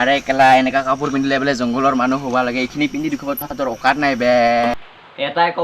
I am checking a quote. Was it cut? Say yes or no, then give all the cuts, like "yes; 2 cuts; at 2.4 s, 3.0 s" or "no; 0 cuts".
no; 0 cuts